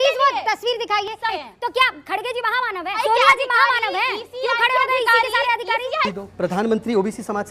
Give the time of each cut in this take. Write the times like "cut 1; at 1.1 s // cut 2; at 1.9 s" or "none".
cut 1; at 1.4 s // cut 2; at 6.1 s